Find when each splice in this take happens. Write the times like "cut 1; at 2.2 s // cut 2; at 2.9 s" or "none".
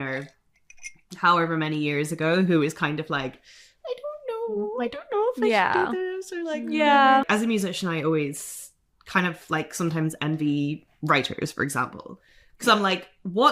cut 1; at 7.3 s